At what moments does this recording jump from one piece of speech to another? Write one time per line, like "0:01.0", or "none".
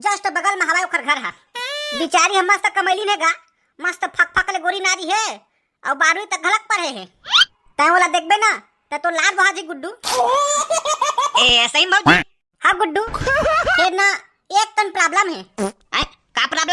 none